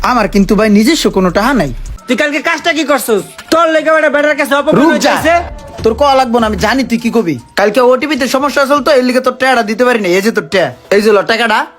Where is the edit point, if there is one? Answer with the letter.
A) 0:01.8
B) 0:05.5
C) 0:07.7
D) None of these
A